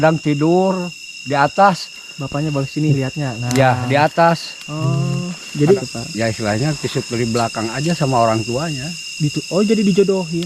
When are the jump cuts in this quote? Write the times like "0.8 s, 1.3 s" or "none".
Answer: 5.8 s